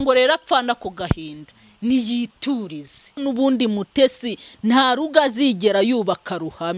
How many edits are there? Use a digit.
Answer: 1